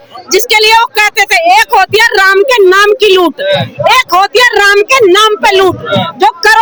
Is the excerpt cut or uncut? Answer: uncut